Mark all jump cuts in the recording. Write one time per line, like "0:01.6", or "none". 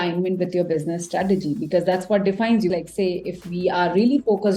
0:02.7